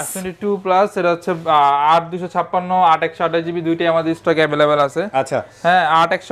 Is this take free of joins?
yes; 0 cuts

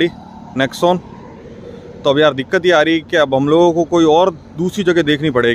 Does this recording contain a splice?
no; 0 cuts

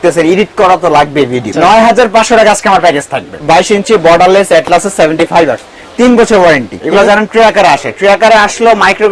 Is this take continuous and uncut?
no; 3 cuts; at 1.5 s, 3.3 s, 6.8 s

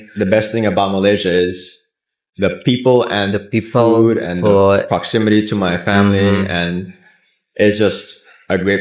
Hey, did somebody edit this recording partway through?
no; 0 cuts

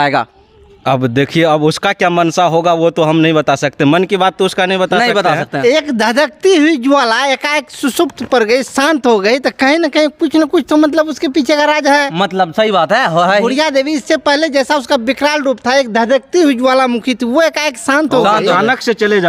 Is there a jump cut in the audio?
no; 0 cuts

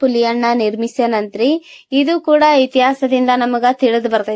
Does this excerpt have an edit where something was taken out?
no; 0 cuts

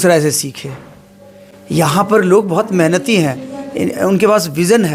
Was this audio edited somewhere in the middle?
no; 0 cuts

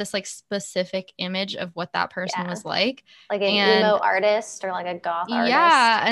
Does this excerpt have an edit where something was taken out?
no; 0 cuts

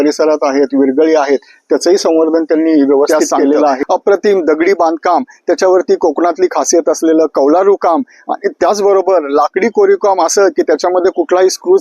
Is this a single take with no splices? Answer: no; 1 cut; at 3.8 s

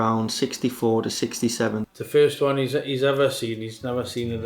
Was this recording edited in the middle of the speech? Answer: yes; 1 cut; at 1.8 s

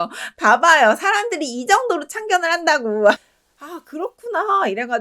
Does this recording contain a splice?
yes; 1 cut; at 3.2 s

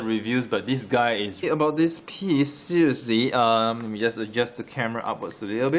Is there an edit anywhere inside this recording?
no; 0 cuts

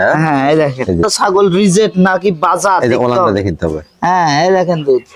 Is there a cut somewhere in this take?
yes; 1 cut; at 1.1 s

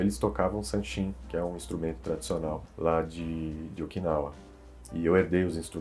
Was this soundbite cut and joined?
no; 0 cuts

